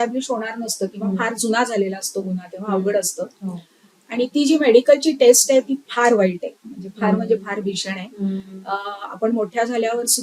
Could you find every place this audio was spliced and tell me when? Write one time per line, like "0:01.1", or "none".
none